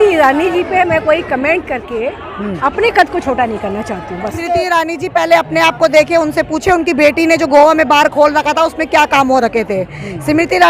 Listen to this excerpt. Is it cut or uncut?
cut